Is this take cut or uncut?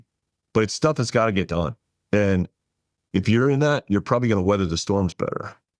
uncut